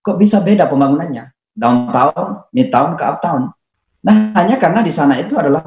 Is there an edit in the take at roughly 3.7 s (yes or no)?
no